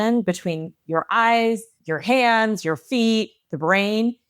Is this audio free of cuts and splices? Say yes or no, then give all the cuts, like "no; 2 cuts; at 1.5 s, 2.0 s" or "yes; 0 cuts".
no; 1 cut; at 1.7 s